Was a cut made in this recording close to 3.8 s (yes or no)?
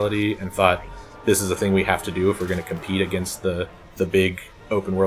yes